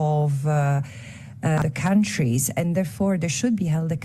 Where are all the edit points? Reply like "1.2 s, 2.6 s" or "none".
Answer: 1.6 s